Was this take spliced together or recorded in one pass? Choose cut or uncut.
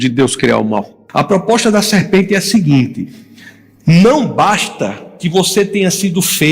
cut